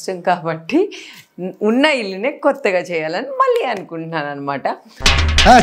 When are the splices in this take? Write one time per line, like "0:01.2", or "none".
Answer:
none